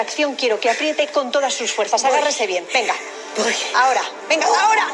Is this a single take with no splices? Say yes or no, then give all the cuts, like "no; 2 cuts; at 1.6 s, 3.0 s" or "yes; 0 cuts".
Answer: yes; 0 cuts